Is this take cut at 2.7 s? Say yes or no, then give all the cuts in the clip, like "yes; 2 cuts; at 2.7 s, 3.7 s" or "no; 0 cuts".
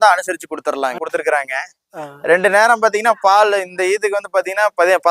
no; 1 cut; at 1.0 s